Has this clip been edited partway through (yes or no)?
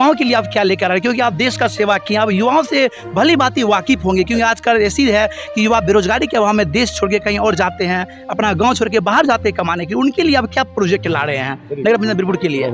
no